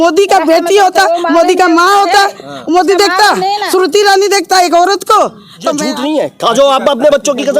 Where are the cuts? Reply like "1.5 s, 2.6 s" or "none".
5.8 s